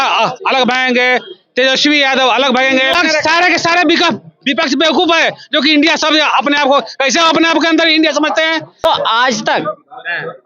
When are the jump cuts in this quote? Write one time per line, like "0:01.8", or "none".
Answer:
0:02.9
0:08.8